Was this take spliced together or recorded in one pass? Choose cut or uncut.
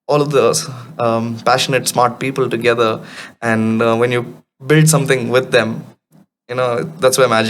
uncut